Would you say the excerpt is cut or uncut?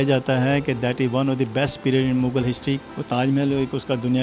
cut